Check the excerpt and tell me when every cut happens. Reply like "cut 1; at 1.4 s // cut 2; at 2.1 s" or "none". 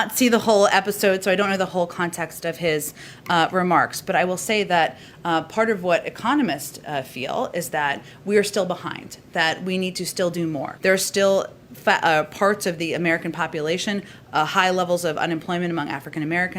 cut 1; at 10.7 s